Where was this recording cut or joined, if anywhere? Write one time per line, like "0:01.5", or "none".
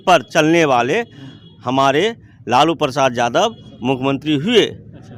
none